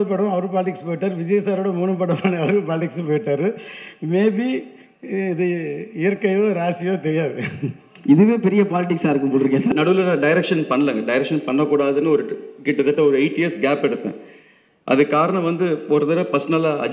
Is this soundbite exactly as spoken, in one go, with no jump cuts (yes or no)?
no